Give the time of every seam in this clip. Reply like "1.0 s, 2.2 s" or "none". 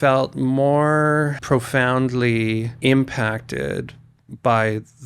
1.4 s, 2.7 s